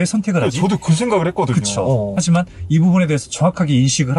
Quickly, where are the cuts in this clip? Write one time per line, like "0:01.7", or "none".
0:02.1